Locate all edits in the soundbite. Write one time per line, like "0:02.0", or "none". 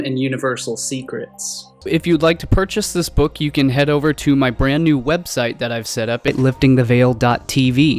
0:06.3

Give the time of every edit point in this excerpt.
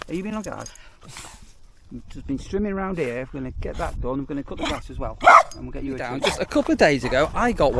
0:06.3

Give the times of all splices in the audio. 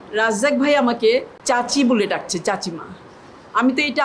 0:01.3

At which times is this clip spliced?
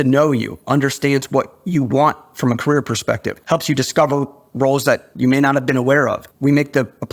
0:03.3
0:05.1
0:06.3

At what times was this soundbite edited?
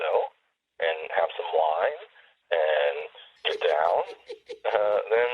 none

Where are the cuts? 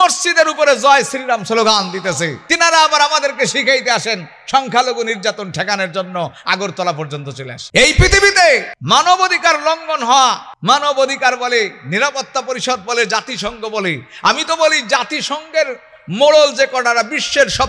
0:02.4
0:07.5
0:08.7
0:10.5

